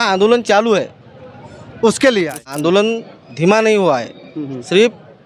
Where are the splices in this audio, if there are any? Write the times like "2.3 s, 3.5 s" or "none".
2.4 s